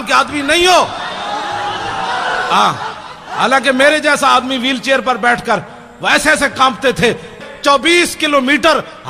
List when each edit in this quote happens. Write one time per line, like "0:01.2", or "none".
0:07.4